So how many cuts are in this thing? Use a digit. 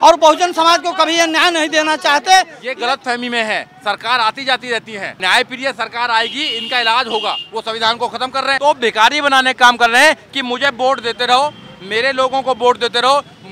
4